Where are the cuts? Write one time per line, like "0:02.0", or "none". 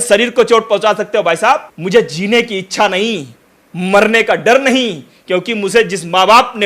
0:01.7